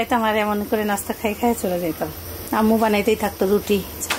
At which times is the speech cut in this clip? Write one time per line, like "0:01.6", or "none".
none